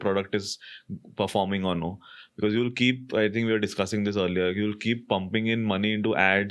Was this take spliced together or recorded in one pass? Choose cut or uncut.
uncut